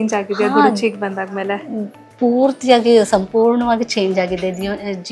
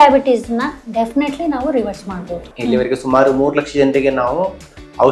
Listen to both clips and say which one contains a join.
second; 1 cut; at 2.5 s

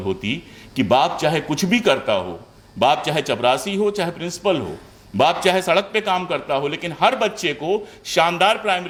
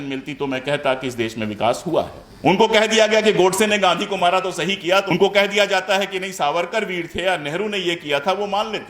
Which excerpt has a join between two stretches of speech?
second; 2 cuts; at 2.2 s, 5.1 s

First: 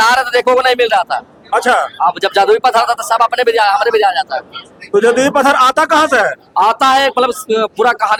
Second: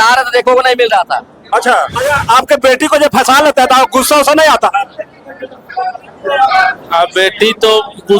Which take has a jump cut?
second; 1 cut; at 1.9 s

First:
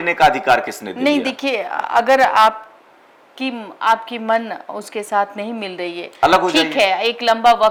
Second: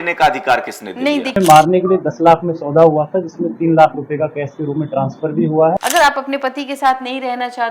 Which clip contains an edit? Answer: second; 2 cuts; at 1.4 s, 5.8 s

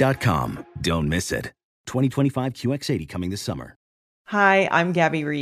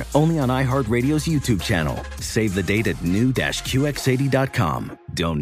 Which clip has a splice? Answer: first; 1 cut; at 3.9 s

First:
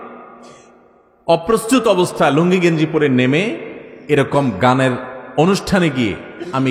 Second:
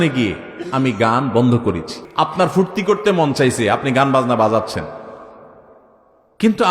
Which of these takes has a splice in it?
second; 1 cut; at 2.0 s

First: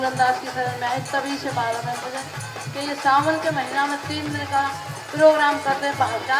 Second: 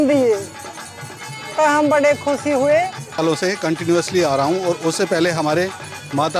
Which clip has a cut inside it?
second; 1 cut; at 3.1 s

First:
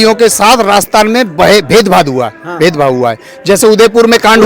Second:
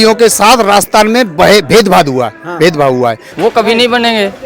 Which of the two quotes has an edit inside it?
second; 1 cut; at 3.3 s

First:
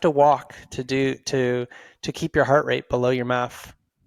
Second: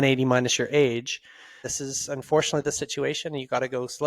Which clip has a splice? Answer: second; 1 cut; at 1.7 s

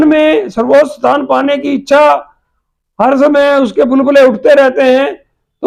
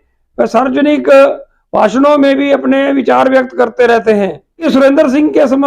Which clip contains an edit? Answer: second; 1 cut; at 4.6 s

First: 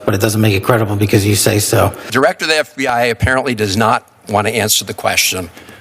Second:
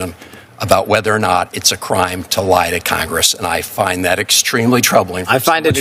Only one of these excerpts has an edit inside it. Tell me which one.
first; 1 cut; at 2.0 s

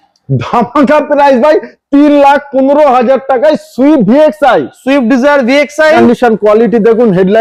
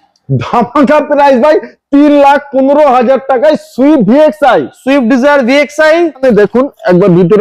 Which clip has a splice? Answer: second; 1 cut; at 6.0 s

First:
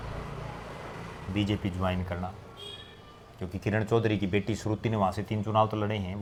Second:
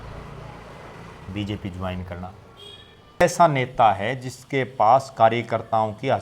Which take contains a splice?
second; 1 cut; at 3.2 s

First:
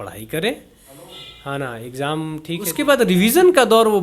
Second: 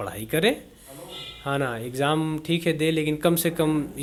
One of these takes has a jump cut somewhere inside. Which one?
first; 1 cut; at 2.7 s

